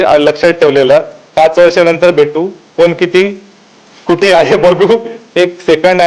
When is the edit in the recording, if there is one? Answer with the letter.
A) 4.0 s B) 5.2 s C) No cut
B